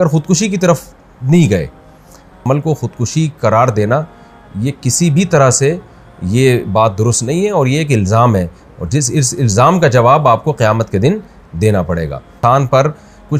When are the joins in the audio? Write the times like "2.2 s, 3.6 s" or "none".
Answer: 2.4 s, 12.3 s

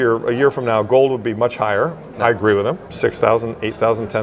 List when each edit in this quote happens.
2.9 s

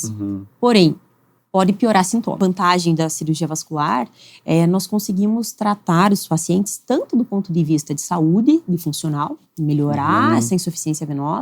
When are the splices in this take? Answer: 2.3 s

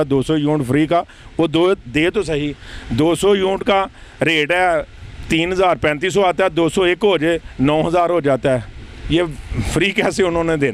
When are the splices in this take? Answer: none

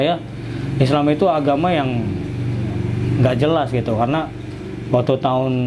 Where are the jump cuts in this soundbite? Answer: none

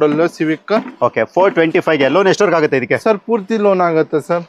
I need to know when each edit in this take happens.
none

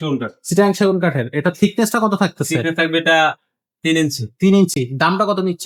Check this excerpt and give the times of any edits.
none

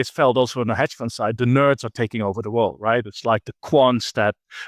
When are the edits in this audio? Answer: none

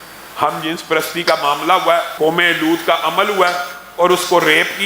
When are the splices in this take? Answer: 2.1 s

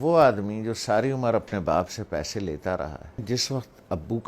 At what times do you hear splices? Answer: 3.2 s

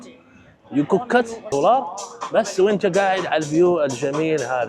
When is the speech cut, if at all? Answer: 1.5 s

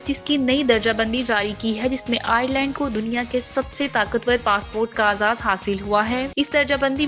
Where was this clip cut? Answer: none

